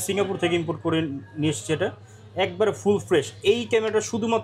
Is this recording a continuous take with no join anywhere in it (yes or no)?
yes